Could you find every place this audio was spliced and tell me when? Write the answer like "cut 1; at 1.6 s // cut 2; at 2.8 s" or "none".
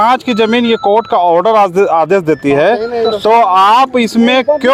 none